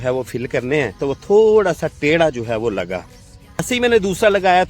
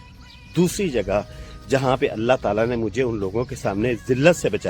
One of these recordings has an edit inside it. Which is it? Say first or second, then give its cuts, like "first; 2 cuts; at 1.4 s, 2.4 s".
first; 2 cuts; at 1.0 s, 3.6 s